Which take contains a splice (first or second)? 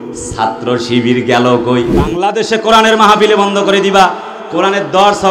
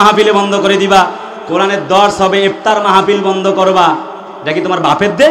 first